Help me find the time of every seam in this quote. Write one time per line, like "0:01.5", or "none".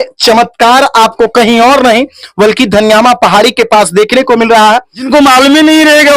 0:05.1